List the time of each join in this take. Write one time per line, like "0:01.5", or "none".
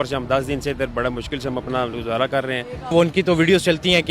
0:02.9